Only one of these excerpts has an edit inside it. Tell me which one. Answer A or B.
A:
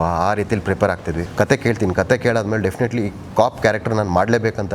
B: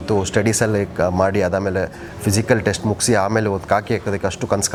A